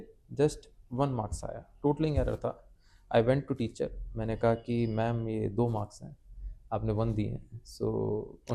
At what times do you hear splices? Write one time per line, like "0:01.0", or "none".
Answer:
none